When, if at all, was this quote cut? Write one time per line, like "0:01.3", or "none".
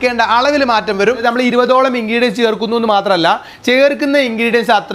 0:01.2